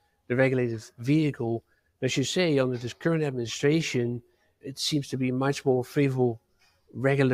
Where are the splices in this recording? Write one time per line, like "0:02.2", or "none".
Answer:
0:04.6